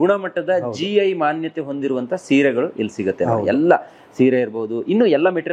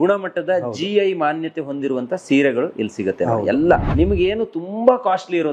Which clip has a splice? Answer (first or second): second